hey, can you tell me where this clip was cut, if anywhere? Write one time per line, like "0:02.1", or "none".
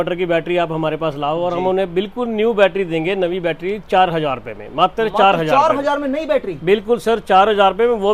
none